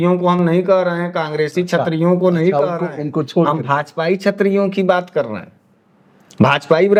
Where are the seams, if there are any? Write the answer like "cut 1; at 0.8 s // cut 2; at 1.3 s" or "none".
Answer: none